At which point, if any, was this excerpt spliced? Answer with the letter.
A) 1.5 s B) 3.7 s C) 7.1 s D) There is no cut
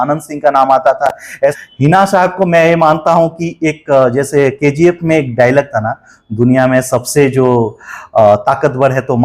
A